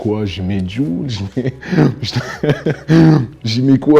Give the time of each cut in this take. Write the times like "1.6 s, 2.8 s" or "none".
none